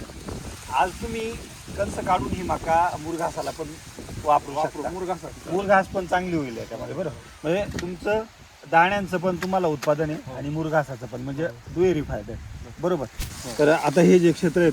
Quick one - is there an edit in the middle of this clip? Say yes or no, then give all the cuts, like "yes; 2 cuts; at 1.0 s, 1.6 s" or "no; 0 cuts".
yes; 1 cut; at 13.2 s